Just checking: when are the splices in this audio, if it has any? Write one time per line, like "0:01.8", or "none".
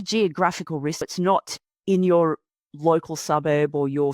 0:01.0